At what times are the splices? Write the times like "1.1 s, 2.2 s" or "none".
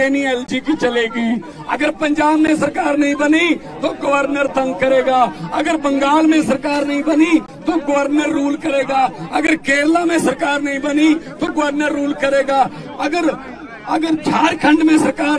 none